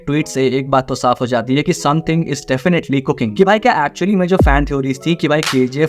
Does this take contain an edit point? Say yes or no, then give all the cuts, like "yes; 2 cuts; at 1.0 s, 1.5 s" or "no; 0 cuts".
yes; 1 cut; at 3.3 s